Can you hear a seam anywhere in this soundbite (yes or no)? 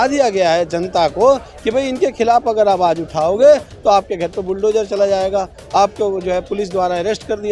no